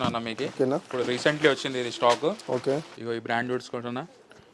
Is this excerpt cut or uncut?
cut